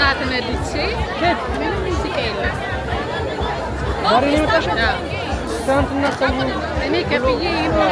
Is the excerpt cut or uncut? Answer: uncut